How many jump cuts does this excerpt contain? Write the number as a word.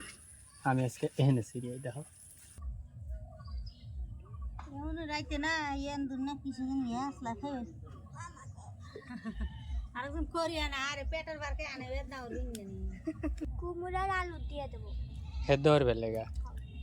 two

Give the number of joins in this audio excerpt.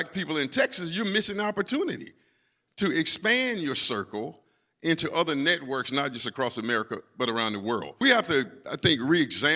one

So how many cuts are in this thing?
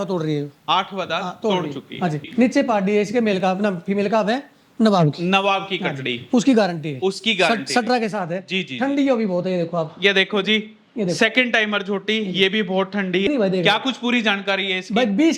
two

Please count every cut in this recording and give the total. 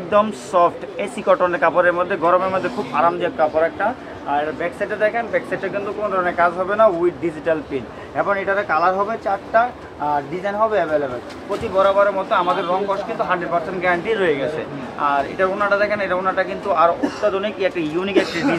zero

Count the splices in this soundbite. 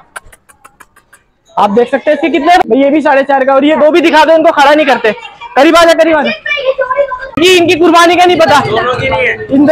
two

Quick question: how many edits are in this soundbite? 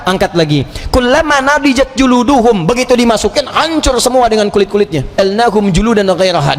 one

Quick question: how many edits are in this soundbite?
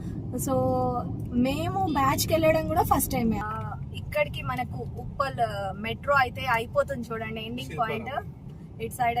one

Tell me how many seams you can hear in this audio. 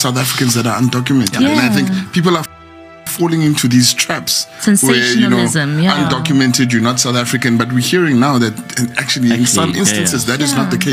zero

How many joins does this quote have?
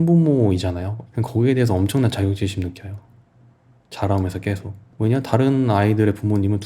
one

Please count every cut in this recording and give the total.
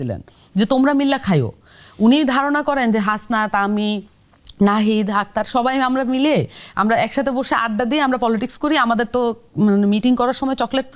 zero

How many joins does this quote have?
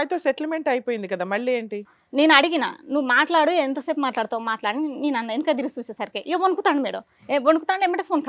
one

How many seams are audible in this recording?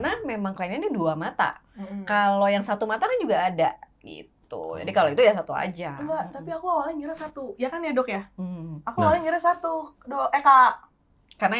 zero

